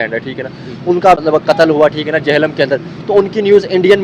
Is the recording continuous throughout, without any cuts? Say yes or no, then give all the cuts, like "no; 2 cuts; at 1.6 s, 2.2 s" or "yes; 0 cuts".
no; 1 cut; at 1.2 s